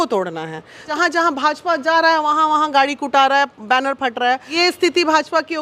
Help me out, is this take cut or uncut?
cut